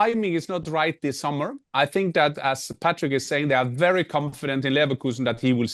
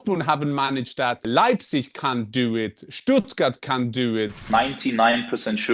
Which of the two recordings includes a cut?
second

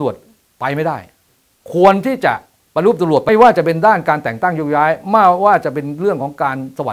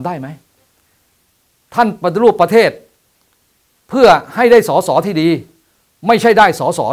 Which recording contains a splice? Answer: first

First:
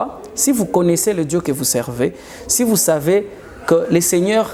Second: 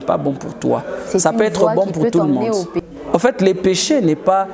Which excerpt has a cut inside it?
second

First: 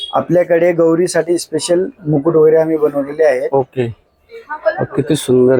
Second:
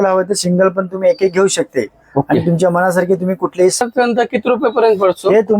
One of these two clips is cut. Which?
second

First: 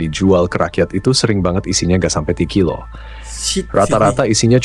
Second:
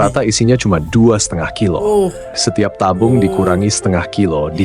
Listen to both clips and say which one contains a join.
second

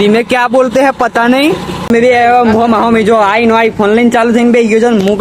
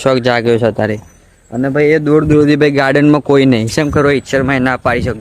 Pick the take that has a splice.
first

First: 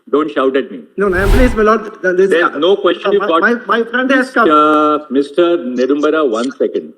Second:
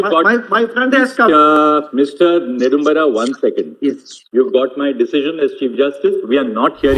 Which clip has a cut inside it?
first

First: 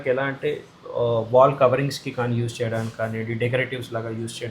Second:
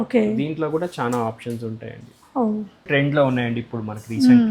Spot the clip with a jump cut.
second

